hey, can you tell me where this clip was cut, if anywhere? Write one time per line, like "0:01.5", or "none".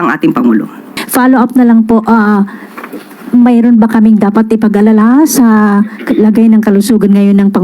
0:01.0